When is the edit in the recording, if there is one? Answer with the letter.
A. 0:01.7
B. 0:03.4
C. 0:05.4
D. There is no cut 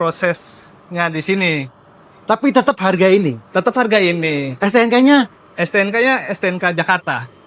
D